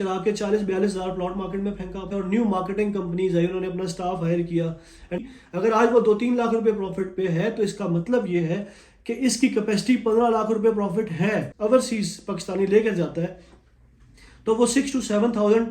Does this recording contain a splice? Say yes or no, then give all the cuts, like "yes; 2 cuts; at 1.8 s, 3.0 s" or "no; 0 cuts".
yes; 3 cuts; at 2.1 s, 5.3 s, 11.4 s